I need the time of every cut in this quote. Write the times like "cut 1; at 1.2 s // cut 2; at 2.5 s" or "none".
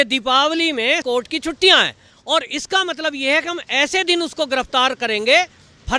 cut 1; at 1.0 s